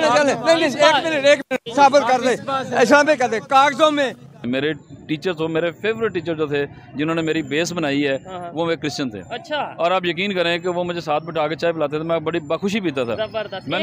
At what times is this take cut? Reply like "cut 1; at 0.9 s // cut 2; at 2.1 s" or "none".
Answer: cut 1; at 4.3 s